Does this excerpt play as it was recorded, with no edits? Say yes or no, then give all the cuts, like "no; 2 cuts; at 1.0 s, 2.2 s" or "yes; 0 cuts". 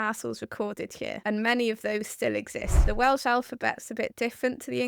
no; 2 cuts; at 1.2 s, 2.8 s